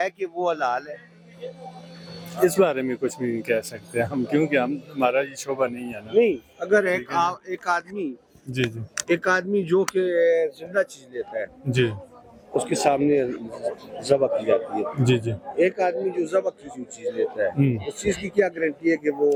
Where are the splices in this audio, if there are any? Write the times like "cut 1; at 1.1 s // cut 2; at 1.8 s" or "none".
none